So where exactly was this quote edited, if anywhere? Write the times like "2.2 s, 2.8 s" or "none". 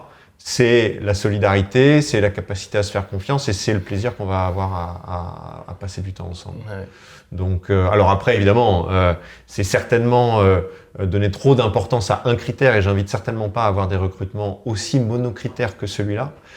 none